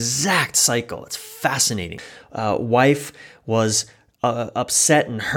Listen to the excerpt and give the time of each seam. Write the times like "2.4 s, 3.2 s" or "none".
2.0 s